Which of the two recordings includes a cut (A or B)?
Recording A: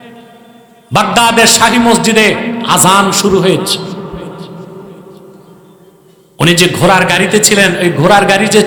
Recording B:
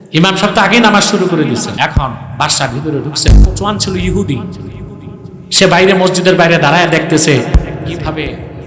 B